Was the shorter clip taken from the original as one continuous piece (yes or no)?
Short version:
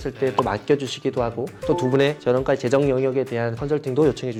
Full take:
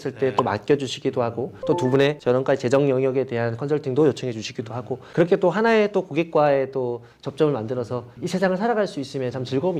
yes